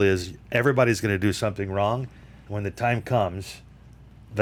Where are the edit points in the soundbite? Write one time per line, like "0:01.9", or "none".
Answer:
none